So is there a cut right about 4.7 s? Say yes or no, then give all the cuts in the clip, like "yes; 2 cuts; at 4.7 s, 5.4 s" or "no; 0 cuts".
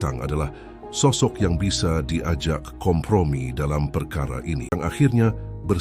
yes; 1 cut; at 4.7 s